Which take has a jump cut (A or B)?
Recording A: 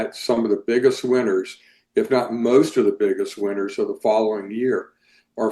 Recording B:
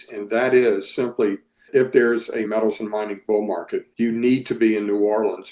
B